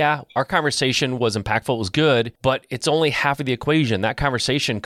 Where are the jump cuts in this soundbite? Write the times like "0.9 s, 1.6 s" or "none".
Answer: 2.3 s